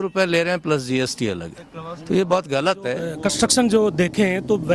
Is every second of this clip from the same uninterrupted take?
no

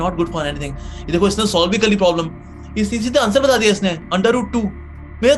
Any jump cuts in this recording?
no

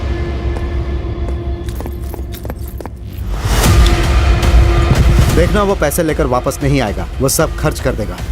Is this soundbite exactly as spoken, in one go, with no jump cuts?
no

